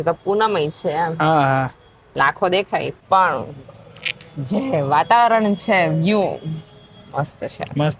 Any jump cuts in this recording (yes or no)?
yes